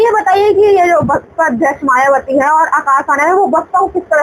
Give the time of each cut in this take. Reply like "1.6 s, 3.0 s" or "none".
none